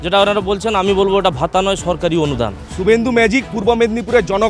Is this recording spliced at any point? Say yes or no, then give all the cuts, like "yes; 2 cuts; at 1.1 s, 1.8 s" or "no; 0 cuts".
yes; 1 cut; at 2.7 s